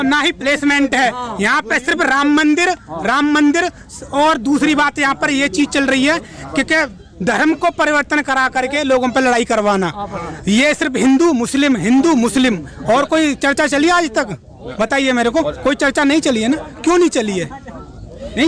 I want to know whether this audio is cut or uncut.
uncut